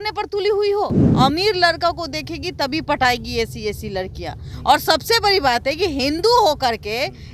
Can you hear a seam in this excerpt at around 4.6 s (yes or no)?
no